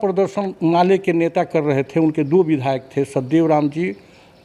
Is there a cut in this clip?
no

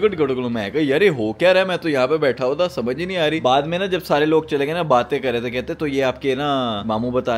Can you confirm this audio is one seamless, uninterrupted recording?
yes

